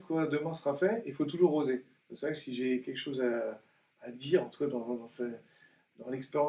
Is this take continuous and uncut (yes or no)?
yes